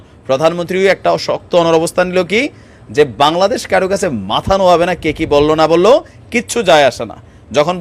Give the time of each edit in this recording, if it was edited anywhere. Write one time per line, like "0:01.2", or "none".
none